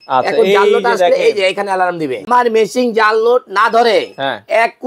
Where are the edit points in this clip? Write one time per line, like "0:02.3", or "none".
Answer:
0:02.2